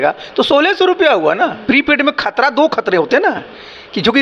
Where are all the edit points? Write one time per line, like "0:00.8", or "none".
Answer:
0:01.6